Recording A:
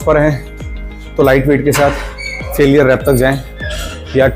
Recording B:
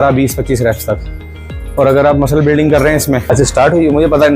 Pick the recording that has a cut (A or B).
B